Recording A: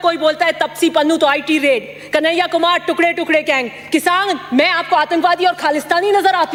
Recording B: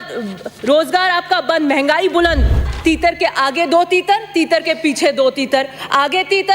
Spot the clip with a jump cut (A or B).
B